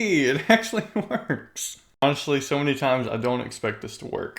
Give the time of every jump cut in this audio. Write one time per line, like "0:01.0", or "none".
0:02.0

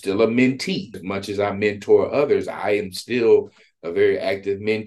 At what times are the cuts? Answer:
0:01.0

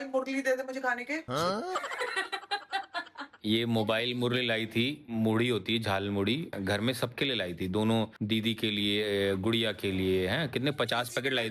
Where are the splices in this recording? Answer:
0:03.2
0:06.5

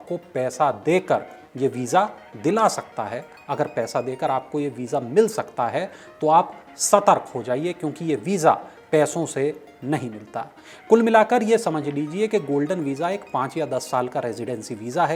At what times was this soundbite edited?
none

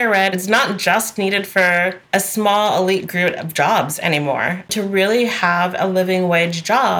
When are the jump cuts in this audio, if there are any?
none

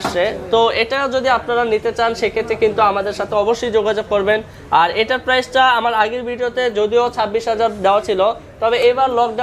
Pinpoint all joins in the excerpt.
none

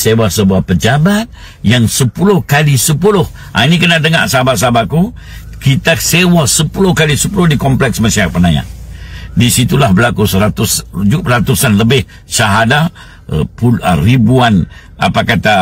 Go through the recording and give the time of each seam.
none

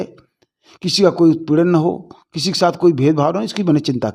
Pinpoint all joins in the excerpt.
none

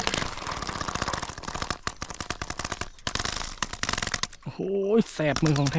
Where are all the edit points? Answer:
none

